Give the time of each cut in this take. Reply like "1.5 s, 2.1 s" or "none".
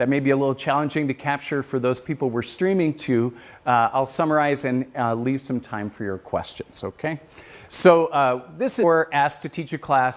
none